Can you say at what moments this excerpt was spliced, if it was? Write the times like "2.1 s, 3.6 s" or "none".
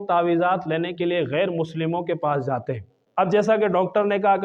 3.0 s

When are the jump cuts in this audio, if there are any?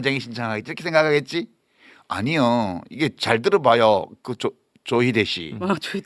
none

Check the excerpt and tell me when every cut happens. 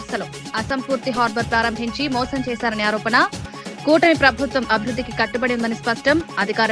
none

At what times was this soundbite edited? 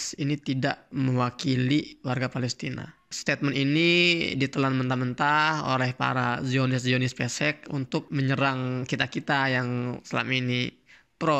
0.8 s, 3.1 s, 8.1 s

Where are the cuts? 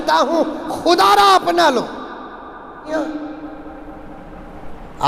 2.9 s

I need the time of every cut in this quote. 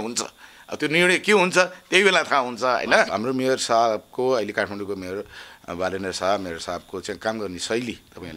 3.1 s

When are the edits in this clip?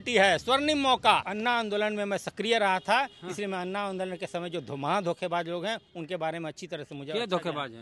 1.3 s

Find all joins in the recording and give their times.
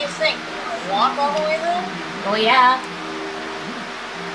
2.5 s

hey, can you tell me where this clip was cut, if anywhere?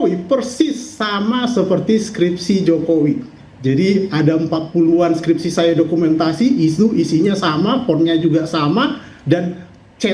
none

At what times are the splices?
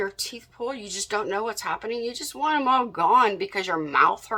none

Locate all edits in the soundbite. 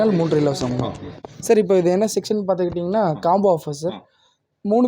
1.3 s

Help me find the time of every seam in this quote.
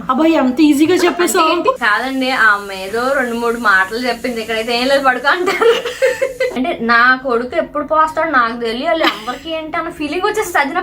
1.8 s, 6.5 s

